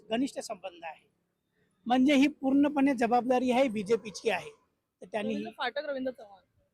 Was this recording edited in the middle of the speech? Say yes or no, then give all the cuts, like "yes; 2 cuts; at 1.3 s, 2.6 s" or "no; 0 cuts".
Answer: no; 0 cuts